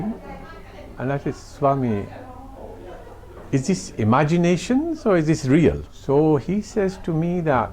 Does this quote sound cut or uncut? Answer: cut